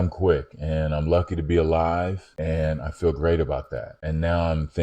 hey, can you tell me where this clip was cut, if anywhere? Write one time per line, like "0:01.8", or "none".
0:02.2
0:03.9